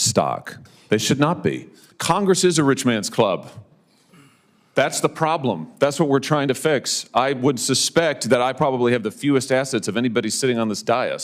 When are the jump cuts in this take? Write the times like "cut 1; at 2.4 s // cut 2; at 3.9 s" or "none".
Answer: cut 1; at 1.9 s